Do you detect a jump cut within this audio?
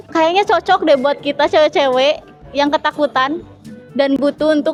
no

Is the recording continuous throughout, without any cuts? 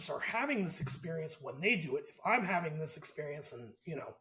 yes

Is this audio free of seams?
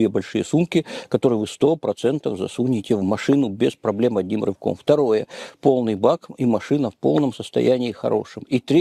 yes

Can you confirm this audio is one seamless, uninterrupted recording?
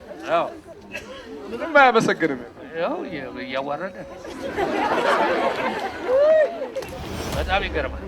no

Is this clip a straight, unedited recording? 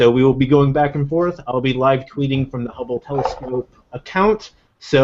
yes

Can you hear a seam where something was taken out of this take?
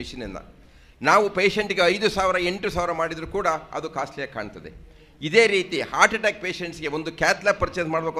no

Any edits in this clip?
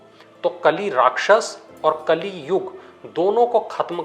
no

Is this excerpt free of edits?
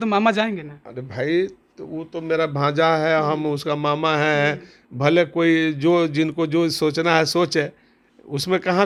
yes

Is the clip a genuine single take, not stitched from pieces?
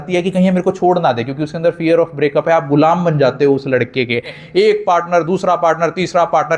no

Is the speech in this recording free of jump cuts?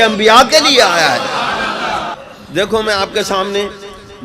no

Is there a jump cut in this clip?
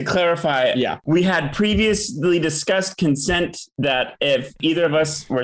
yes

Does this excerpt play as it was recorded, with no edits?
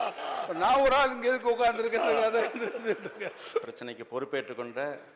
no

